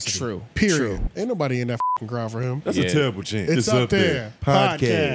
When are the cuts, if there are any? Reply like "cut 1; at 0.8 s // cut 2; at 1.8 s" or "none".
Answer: cut 1; at 1.1 s // cut 2; at 3.4 s